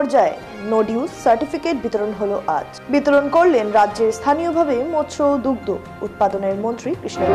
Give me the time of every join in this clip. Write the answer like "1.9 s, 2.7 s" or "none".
none